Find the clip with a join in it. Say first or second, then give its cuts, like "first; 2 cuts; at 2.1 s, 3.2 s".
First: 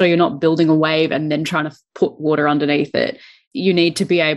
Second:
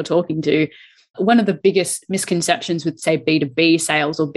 first; 1 cut; at 3.4 s